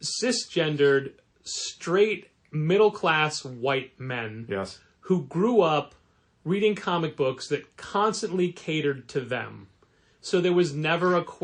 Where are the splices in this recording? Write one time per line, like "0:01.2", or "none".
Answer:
none